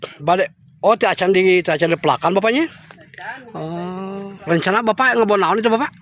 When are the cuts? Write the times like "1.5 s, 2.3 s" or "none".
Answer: 4.4 s